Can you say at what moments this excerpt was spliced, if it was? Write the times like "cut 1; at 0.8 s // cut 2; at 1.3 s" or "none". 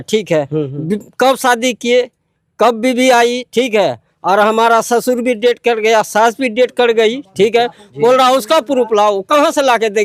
none